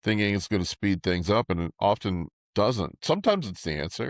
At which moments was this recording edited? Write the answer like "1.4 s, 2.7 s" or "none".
2.3 s